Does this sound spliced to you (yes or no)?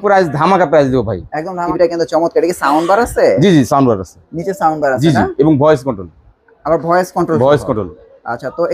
yes